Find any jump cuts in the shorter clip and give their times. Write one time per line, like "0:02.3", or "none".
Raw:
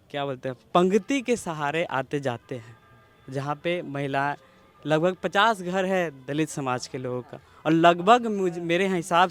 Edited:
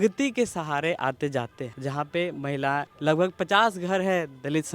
0:01.6
0:02.9